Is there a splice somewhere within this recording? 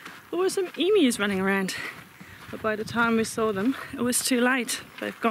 no; 0 cuts

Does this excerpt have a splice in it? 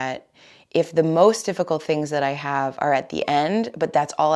no; 0 cuts

